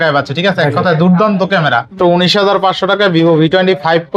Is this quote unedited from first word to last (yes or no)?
no